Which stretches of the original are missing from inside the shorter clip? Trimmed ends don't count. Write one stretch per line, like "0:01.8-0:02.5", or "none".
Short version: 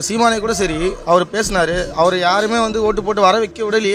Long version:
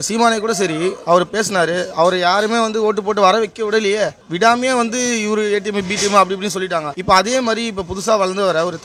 none